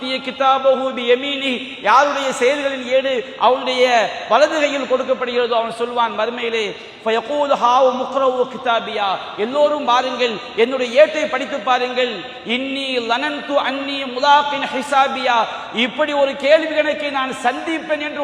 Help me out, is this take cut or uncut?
uncut